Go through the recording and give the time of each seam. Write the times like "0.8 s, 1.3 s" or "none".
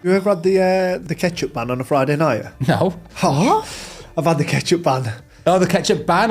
1.0 s